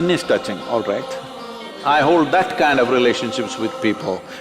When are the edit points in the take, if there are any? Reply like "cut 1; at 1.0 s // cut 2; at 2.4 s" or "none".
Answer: cut 1; at 1.7 s

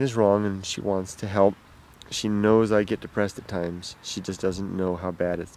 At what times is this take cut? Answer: none

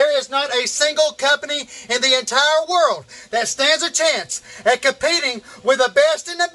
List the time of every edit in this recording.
none

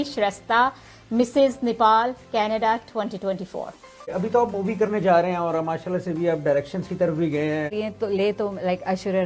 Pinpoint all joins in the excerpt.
cut 1; at 4.0 s // cut 2; at 7.7 s

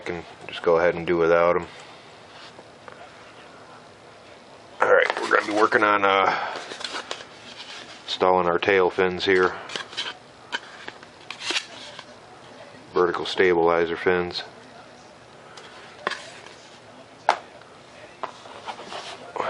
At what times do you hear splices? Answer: cut 1; at 18.0 s

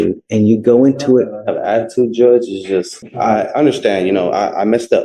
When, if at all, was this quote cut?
cut 1; at 3.0 s

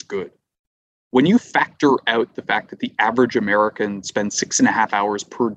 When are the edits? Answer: none

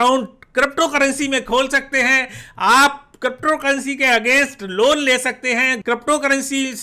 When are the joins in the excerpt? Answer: cut 1; at 5.7 s

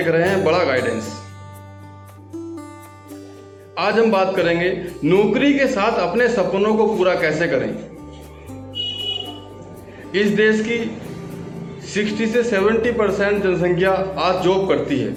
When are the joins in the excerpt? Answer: none

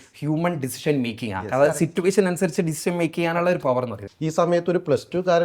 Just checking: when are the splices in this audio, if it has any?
cut 1; at 4.1 s

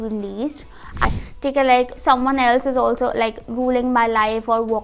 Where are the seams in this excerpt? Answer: cut 1; at 1.0 s

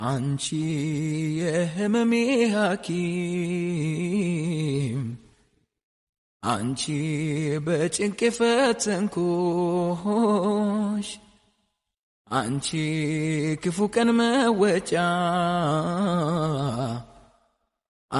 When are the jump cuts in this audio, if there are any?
none

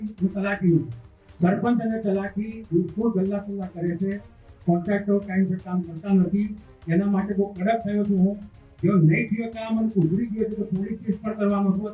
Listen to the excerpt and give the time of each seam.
none

